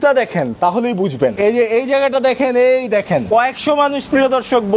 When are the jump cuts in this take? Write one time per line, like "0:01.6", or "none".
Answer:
0:01.3
0:03.3